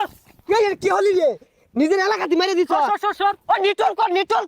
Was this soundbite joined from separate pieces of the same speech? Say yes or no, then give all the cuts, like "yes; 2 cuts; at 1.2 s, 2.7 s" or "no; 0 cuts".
no; 0 cuts